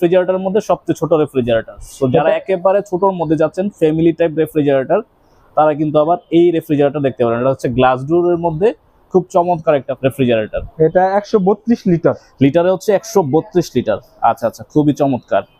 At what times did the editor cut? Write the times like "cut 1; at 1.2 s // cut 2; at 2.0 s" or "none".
none